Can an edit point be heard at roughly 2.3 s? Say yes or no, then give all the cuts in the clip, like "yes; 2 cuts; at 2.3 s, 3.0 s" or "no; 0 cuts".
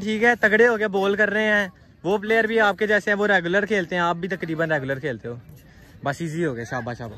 no; 0 cuts